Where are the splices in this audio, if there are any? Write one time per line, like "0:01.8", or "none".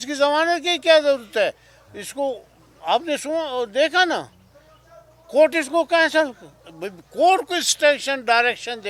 none